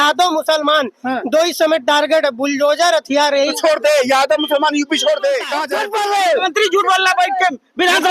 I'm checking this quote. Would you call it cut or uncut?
cut